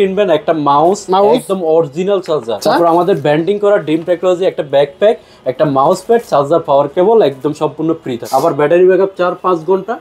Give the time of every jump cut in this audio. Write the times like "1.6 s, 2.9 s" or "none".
2.6 s, 8.2 s